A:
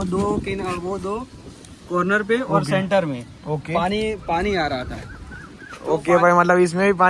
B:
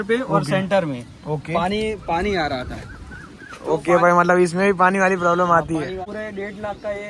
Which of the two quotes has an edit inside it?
B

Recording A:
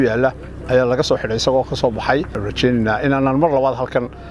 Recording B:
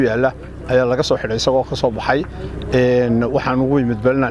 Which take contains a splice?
A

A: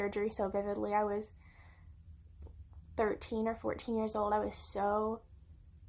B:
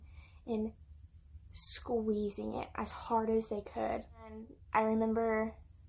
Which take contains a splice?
B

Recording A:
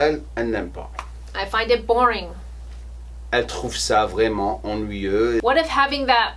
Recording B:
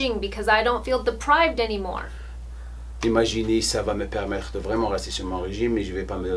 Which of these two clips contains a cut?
A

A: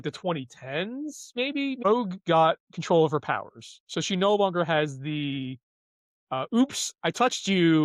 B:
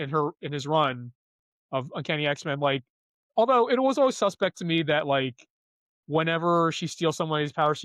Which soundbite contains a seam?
A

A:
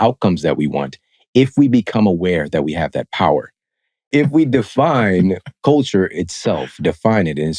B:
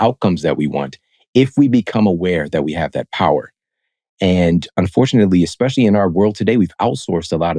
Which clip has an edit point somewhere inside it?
A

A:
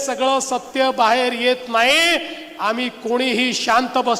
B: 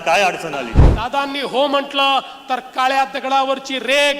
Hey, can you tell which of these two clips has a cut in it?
B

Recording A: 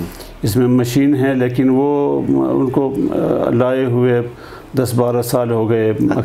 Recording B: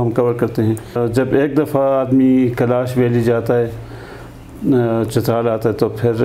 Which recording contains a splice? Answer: B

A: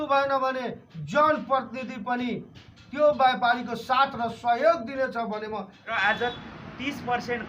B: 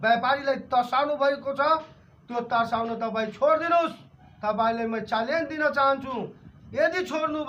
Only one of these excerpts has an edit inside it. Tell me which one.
A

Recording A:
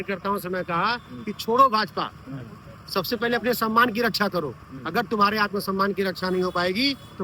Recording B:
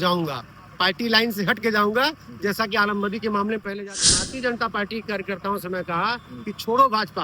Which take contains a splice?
B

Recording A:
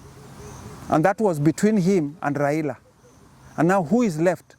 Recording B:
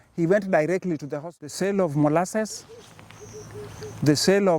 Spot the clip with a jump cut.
B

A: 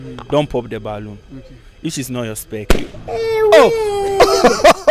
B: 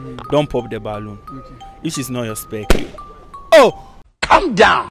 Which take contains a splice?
A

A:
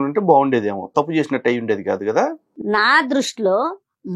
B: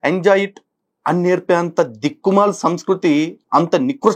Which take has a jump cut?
A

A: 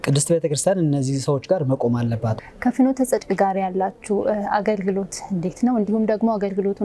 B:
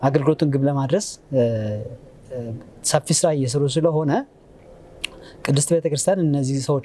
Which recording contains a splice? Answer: A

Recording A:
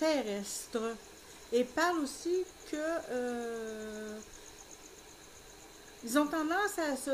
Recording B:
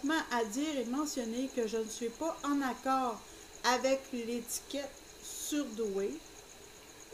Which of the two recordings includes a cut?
A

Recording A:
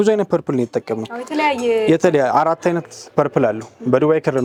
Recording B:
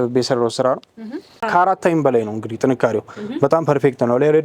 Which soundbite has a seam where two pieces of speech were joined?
B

